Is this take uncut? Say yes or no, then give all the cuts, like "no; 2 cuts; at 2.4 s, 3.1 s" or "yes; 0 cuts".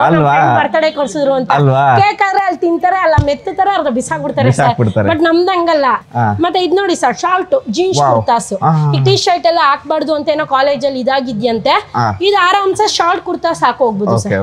yes; 0 cuts